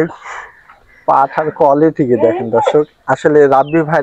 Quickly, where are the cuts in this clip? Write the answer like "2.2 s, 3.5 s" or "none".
none